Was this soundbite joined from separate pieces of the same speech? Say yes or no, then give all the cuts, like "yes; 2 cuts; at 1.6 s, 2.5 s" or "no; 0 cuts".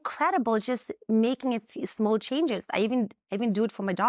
no; 0 cuts